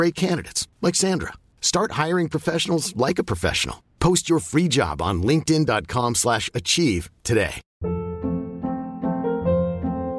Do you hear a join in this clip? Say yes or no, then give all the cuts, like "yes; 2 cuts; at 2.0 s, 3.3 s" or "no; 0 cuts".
yes; 1 cut; at 7.7 s